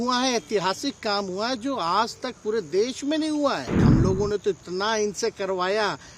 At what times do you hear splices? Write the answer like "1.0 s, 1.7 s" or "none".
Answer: 3.8 s